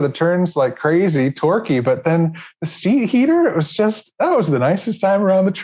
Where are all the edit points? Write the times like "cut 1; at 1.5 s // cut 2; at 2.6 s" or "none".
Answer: none